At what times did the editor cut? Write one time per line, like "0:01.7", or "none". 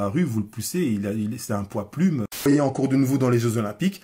0:02.5